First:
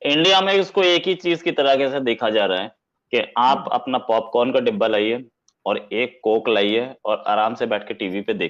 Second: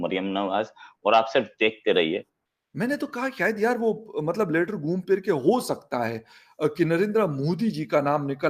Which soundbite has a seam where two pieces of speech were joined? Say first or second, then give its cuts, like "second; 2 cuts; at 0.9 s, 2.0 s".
second; 1 cut; at 2.3 s